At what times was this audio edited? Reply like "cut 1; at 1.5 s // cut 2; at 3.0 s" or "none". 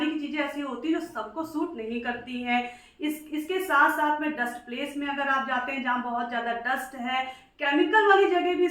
none

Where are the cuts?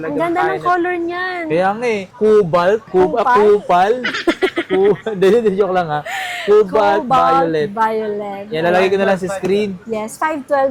none

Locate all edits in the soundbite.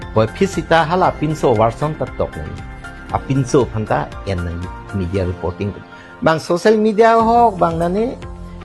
none

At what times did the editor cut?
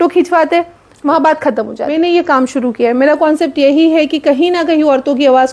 cut 1; at 1.9 s

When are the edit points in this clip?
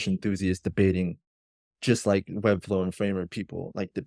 none

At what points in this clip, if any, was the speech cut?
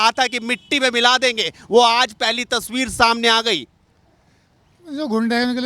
none

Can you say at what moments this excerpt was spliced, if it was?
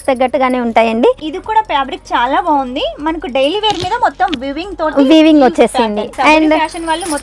cut 1; at 1.3 s // cut 2; at 6.0 s

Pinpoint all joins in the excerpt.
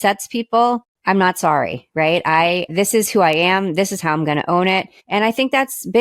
cut 1; at 0.9 s // cut 2; at 2.7 s // cut 3; at 5.0 s

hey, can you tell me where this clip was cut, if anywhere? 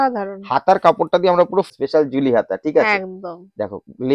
cut 1; at 1.7 s

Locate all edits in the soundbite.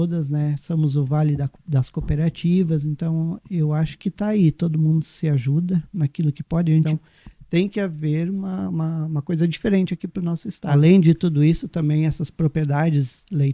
cut 1; at 6.9 s // cut 2; at 10.5 s

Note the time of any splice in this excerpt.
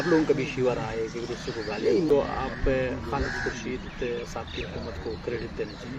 cut 1; at 2.0 s

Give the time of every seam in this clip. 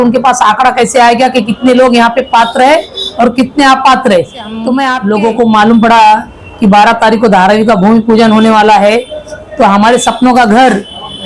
cut 1; at 4.9 s

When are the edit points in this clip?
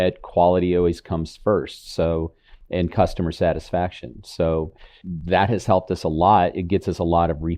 cut 1; at 5.0 s

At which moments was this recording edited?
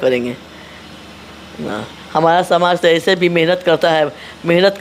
none

